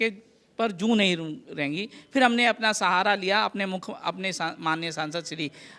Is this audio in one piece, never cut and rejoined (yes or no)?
yes